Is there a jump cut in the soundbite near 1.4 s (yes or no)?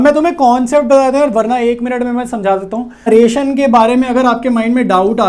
no